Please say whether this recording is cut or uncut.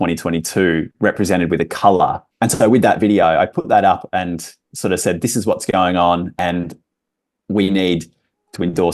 cut